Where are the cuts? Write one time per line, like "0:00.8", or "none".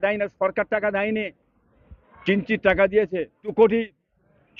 0:03.5